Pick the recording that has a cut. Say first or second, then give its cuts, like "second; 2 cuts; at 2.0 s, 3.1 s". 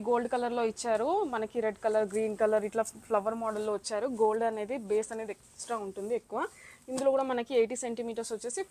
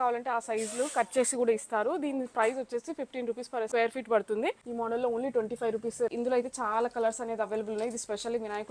second; 3 cuts; at 3.7 s, 4.6 s, 6.1 s